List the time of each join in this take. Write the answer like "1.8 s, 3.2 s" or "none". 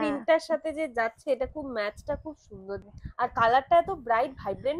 2.8 s